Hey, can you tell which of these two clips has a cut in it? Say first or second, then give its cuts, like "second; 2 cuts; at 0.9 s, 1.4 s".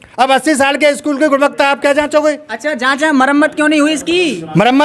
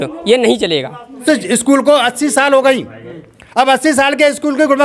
second; 1 cut; at 1.2 s